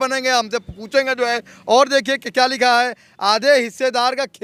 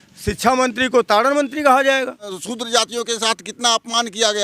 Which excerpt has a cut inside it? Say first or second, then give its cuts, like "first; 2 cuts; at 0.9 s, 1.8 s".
second; 1 cut; at 2.4 s